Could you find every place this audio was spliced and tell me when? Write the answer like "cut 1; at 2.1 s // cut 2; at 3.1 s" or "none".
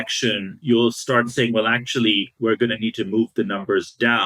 none